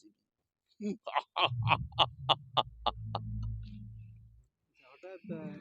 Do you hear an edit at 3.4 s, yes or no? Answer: no